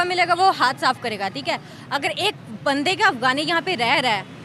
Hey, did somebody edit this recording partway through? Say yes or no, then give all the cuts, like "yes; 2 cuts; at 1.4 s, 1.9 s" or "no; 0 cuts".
no; 0 cuts